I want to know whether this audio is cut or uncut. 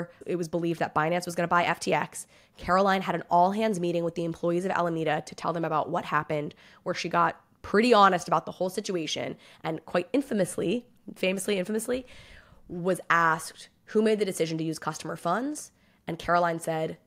uncut